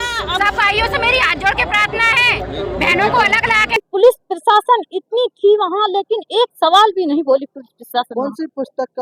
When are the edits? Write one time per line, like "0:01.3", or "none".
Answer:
0:03.9